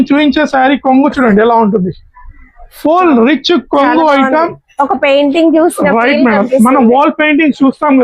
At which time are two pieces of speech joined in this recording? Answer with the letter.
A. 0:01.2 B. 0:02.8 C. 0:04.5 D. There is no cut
D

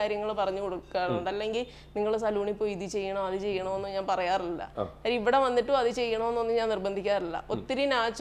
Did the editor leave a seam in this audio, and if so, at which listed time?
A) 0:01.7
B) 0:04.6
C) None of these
C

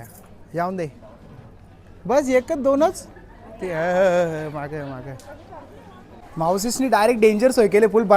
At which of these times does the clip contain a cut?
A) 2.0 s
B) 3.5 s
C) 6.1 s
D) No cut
C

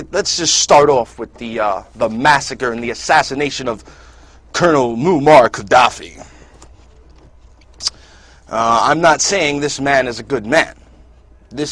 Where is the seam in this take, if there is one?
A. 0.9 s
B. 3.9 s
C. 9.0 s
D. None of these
C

